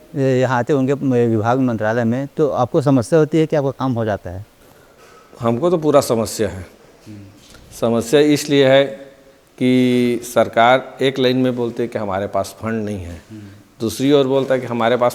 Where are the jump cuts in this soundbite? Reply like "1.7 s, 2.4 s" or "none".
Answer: none